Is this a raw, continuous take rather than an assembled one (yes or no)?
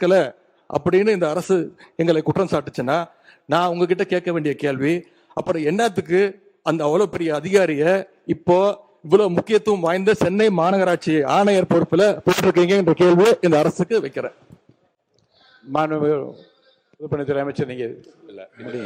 yes